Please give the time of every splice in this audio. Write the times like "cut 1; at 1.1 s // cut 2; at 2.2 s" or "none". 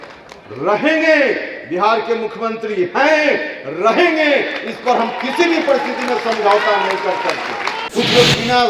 cut 1; at 7.8 s